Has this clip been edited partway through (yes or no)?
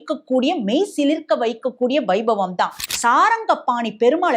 yes